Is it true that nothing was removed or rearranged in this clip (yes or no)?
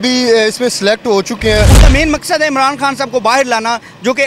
no